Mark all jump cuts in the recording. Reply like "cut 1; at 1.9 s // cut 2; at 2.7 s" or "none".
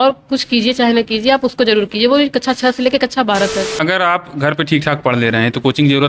cut 1; at 3.7 s